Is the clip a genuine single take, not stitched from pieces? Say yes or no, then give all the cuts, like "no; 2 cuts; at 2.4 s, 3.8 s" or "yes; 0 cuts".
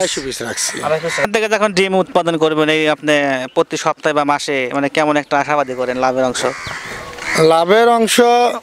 no; 1 cut; at 1.3 s